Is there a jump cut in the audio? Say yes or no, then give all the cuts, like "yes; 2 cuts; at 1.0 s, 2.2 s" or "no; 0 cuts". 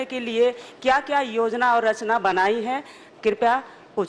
no; 0 cuts